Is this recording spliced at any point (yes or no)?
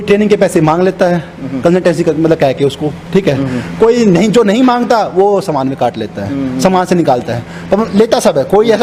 no